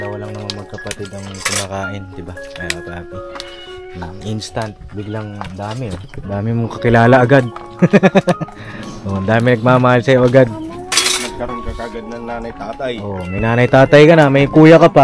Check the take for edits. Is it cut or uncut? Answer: uncut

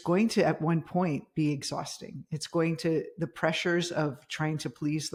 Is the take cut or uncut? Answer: uncut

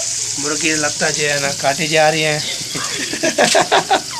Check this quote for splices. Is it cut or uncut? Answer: uncut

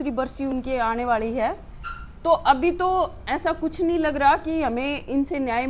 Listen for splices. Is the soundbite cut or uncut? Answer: uncut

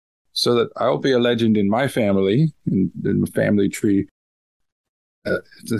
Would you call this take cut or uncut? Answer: uncut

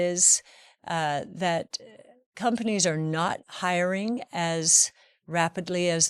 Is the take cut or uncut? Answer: uncut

